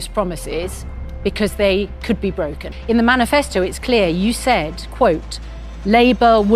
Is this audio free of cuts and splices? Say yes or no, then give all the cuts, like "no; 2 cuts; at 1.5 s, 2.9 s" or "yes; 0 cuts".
no; 1 cut; at 2.7 s